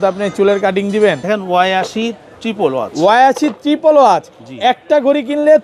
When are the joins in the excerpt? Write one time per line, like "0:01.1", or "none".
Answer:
0:01.2